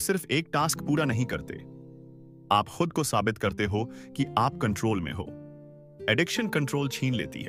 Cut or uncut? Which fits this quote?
uncut